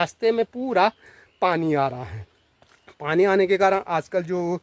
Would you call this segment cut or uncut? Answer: uncut